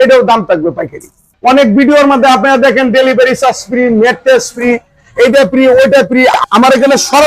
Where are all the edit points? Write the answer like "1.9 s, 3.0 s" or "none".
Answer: 1.2 s, 6.4 s